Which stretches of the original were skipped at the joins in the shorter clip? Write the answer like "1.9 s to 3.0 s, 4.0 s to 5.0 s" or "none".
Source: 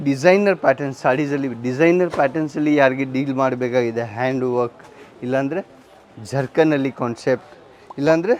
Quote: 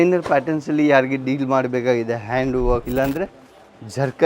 4.7 s to 5.2 s